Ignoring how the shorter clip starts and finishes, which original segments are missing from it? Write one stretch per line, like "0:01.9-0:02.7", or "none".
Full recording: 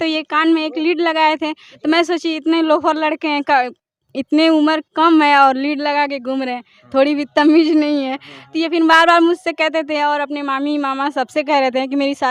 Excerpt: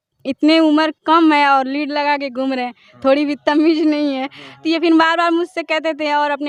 none